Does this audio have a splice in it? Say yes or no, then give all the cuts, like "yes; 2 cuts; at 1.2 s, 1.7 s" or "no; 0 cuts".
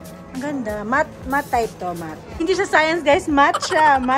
yes; 1 cut; at 2.3 s